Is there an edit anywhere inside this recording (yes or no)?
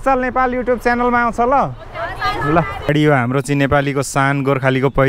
yes